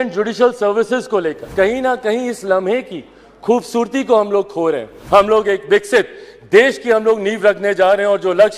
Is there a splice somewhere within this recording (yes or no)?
yes